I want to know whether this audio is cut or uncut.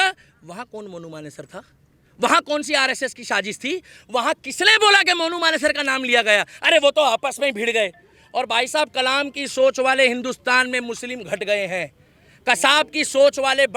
uncut